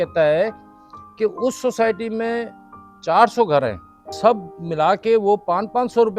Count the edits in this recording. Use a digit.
1